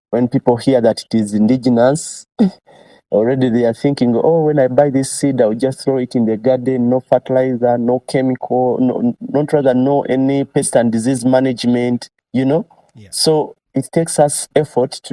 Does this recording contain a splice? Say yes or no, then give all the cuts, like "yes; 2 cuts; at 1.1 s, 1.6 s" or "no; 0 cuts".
no; 0 cuts